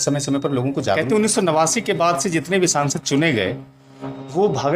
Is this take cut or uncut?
cut